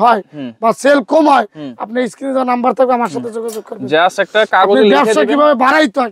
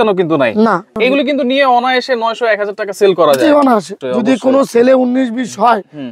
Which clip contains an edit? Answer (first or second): second